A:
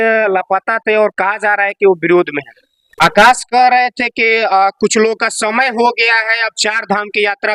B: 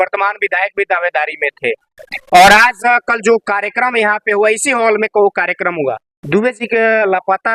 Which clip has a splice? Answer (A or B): A